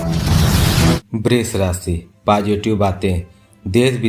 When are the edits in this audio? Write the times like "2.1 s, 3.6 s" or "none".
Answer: 0.9 s